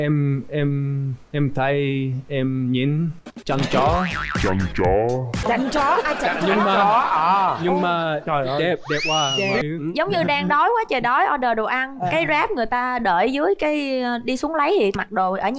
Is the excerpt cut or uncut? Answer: cut